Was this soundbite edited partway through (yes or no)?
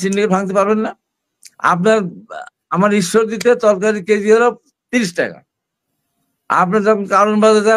no